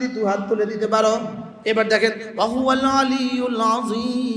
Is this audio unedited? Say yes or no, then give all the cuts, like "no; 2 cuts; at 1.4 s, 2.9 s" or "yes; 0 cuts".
no; 1 cut; at 1.4 s